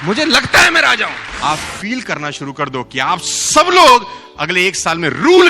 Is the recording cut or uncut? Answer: cut